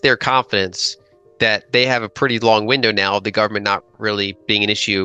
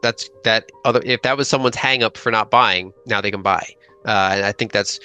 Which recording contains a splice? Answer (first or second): second